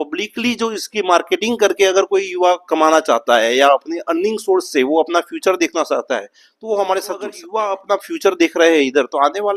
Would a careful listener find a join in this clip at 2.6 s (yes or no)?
no